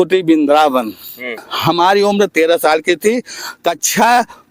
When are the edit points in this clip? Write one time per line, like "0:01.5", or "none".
0:01.5